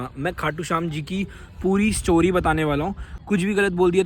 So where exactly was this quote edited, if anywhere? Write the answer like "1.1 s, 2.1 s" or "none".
3.1 s